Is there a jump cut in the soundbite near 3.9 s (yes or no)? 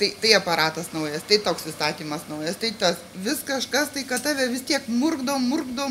no